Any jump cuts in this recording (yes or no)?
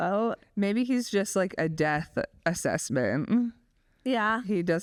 no